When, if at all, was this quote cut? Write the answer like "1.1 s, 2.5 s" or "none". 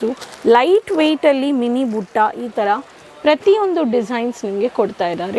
none